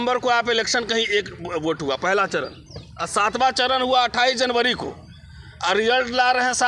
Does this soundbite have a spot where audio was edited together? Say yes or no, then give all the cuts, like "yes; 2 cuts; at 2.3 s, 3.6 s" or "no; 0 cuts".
no; 0 cuts